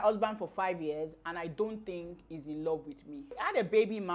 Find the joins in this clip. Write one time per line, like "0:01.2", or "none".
0:03.2